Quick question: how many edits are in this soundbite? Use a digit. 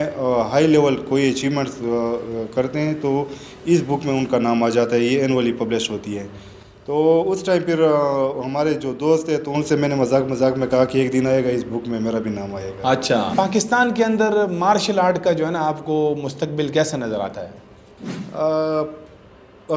1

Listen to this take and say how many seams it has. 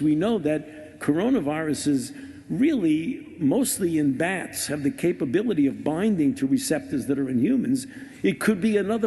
1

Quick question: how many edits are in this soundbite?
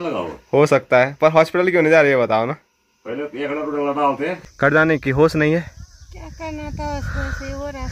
1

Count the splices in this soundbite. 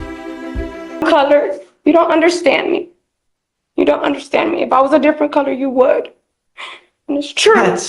1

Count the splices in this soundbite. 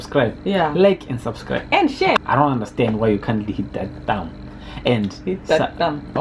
1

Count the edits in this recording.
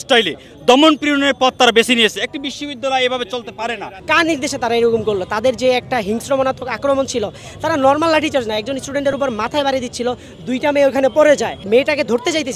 2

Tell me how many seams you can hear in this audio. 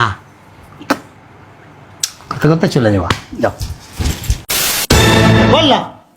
1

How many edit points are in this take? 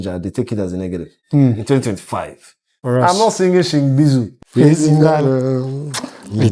3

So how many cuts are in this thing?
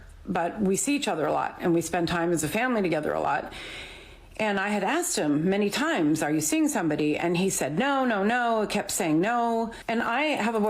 1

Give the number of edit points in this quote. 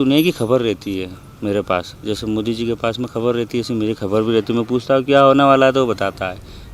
0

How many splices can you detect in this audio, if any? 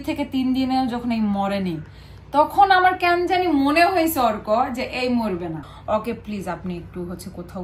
1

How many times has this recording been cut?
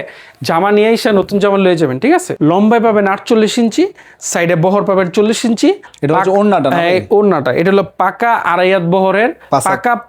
2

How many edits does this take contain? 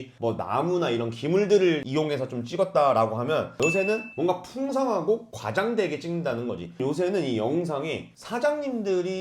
1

